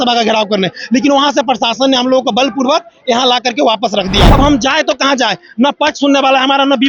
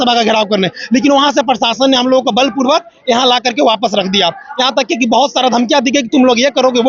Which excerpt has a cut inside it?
first; 1 cut; at 4.3 s

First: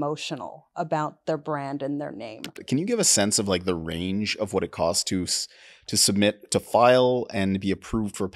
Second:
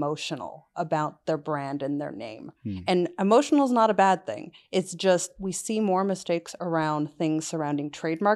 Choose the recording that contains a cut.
first; 1 cut; at 2.6 s

